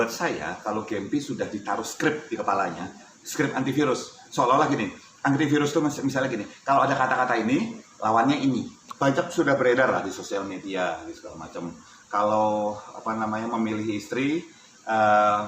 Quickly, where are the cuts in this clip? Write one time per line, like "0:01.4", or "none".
0:08.8